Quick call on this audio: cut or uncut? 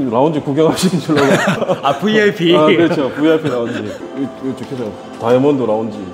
uncut